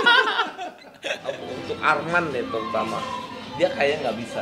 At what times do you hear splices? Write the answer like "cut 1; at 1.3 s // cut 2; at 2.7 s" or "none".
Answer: cut 1; at 1.5 s

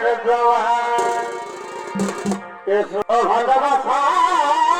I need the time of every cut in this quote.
cut 1; at 3.0 s

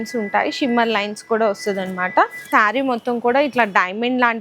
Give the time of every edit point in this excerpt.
cut 1; at 2.5 s

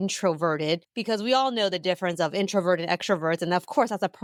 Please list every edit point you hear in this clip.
none

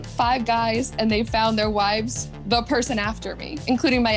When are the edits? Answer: none

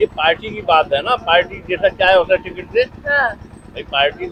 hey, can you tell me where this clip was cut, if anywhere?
none

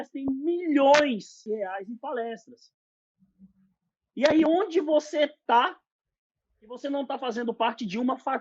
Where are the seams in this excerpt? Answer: cut 1; at 1.3 s

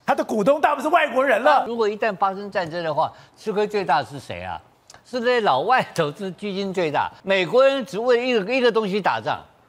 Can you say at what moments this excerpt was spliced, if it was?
cut 1; at 1.7 s // cut 2; at 7.2 s

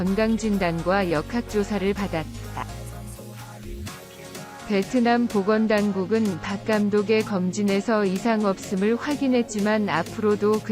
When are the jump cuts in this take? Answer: cut 1; at 2.7 s // cut 2; at 4.7 s

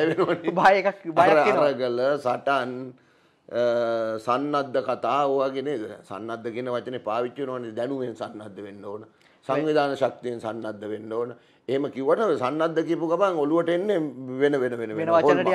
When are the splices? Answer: none

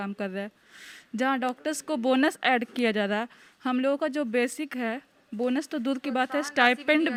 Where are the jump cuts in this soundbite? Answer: none

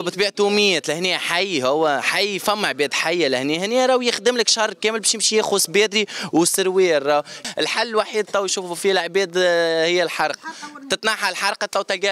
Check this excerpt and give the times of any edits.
cut 1; at 7.4 s

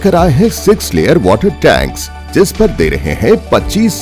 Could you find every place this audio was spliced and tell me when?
none

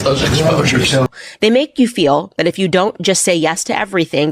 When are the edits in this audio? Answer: cut 1; at 1.1 s

